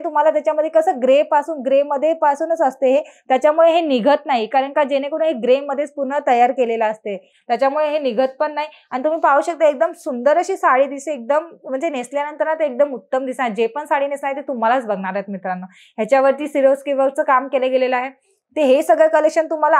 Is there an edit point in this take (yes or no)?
no